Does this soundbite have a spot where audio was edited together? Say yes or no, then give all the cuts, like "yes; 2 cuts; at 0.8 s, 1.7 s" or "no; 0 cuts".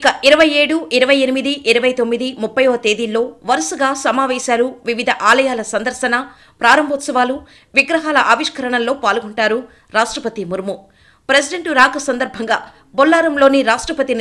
no; 0 cuts